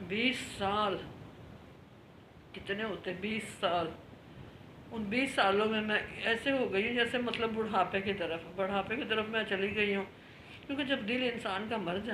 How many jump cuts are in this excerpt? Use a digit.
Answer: 0